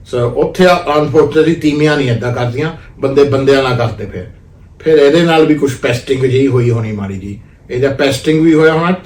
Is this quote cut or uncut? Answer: uncut